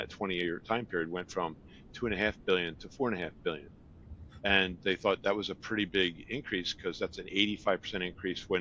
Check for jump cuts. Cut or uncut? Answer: uncut